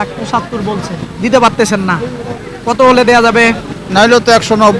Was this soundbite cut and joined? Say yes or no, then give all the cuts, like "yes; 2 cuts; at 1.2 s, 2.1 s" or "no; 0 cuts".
no; 0 cuts